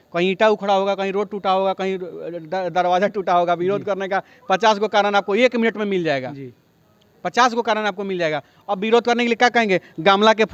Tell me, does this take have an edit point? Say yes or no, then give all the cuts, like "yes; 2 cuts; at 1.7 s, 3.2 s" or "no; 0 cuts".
no; 0 cuts